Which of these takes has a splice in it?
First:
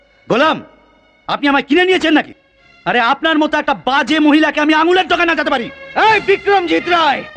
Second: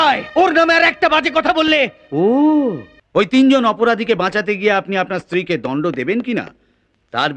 second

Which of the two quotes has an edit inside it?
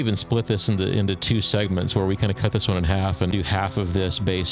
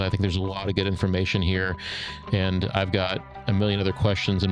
first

